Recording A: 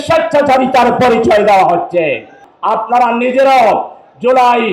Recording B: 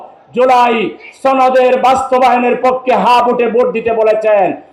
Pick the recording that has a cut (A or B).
A